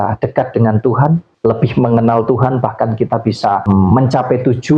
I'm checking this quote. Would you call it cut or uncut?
cut